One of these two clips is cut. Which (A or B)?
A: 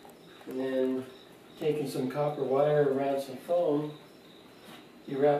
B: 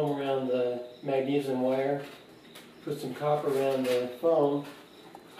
B